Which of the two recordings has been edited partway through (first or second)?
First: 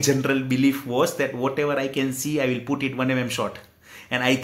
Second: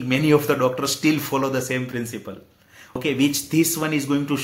second